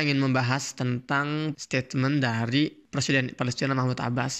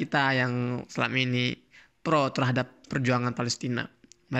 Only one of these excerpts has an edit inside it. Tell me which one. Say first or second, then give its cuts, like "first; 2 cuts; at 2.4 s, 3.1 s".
first; 2 cuts; at 1.6 s, 2.9 s